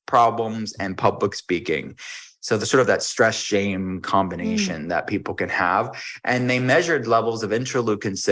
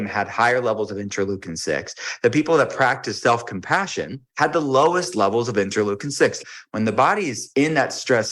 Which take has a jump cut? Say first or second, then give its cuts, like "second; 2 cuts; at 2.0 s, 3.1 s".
second; 3 cuts; at 4.2 s, 6.4 s, 7.4 s